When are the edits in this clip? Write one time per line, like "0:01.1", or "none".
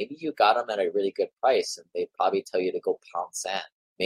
none